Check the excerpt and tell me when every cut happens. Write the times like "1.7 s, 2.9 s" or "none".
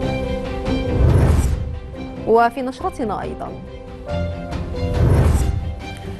1.0 s